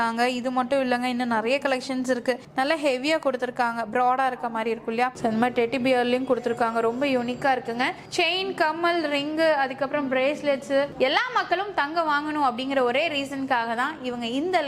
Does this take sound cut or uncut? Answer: cut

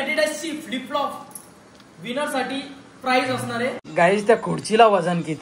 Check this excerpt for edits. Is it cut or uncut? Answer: cut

